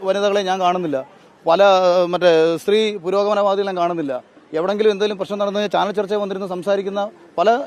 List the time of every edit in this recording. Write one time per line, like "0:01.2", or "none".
none